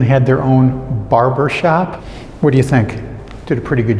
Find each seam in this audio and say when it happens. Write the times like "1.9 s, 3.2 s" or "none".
2.0 s